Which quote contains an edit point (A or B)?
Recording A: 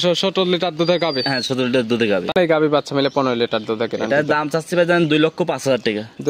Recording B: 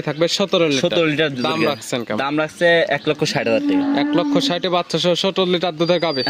A